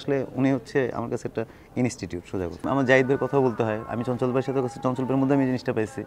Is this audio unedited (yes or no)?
no